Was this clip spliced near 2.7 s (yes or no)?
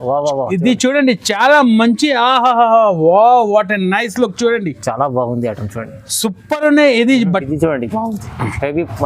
no